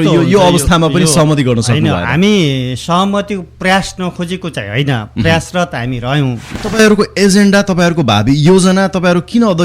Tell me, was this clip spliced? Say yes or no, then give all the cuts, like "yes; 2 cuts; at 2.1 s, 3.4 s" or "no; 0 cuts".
yes; 1 cut; at 6.7 s